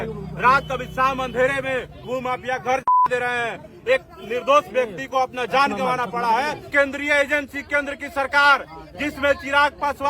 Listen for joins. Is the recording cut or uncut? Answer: cut